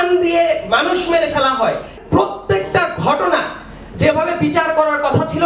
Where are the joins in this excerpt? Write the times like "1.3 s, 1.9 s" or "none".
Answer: 2.0 s